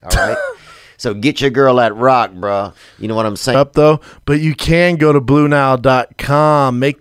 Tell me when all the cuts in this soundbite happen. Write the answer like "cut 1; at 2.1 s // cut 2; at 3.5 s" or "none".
cut 1; at 3.5 s